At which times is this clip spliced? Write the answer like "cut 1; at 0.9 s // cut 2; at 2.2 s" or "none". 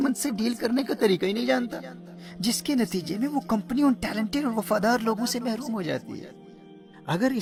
none

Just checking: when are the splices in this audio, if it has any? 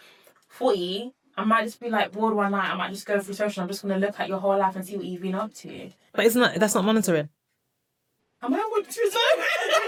none

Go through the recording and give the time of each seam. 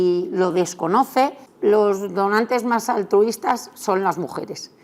cut 1; at 1.5 s

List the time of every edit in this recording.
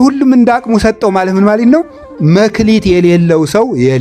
none

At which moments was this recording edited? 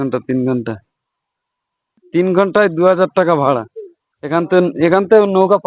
cut 1; at 2.0 s

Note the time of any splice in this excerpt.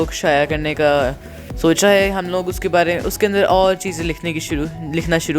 none

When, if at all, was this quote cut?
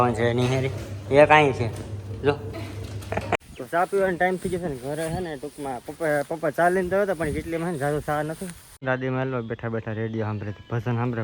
cut 1; at 3.4 s // cut 2; at 8.8 s

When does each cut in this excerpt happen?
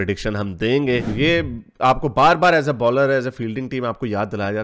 cut 1; at 1.1 s

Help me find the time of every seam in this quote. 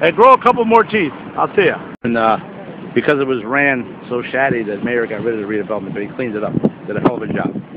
none

